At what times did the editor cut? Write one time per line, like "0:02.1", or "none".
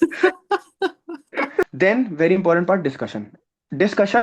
0:01.6